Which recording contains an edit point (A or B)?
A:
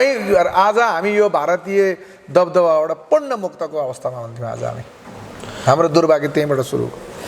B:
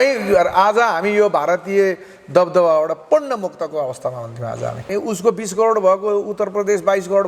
B